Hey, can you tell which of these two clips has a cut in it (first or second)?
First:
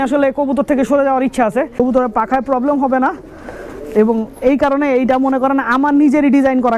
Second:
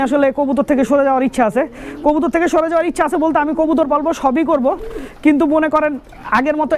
first